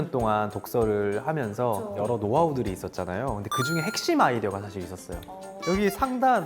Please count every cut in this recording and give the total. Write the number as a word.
two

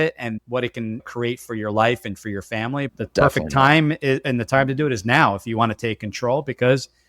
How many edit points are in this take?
two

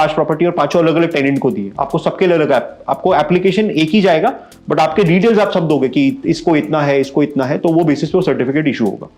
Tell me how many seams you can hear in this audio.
zero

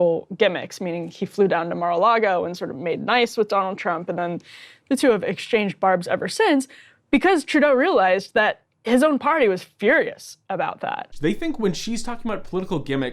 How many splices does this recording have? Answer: one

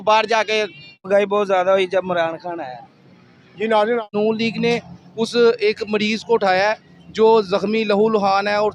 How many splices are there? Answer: two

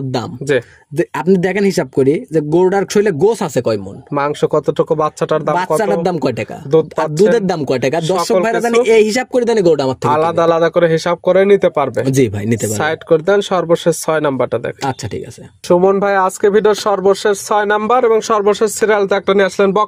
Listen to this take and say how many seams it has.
zero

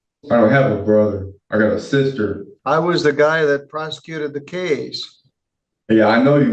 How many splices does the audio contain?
one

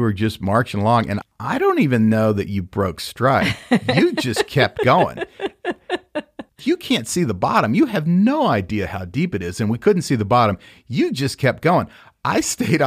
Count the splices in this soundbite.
one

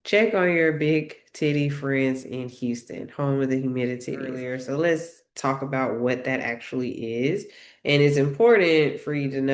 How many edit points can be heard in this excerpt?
one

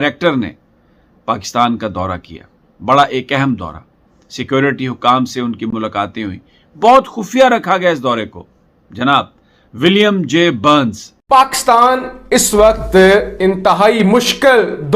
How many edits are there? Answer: one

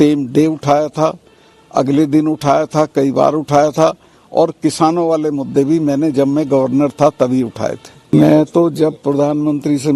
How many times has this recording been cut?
one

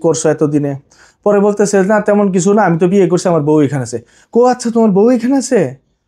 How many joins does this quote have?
zero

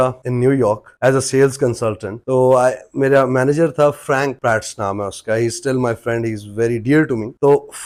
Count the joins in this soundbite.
zero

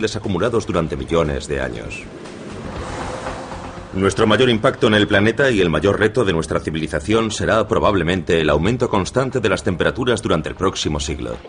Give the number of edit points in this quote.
one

